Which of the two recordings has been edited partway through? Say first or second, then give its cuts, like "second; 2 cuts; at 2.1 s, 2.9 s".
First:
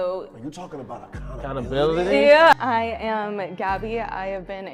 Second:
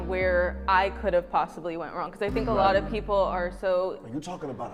first; 1 cut; at 2.5 s